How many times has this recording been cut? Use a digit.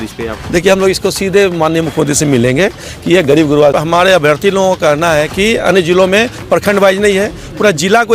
1